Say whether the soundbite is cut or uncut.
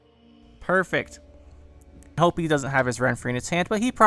cut